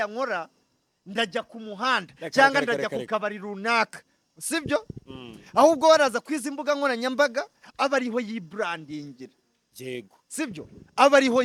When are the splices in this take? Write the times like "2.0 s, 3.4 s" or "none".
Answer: none